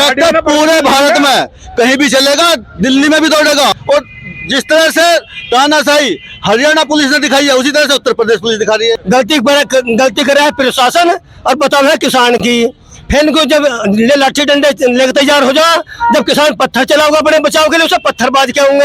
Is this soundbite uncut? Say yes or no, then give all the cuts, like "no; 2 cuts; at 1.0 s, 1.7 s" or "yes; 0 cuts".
no; 2 cuts; at 3.7 s, 9.0 s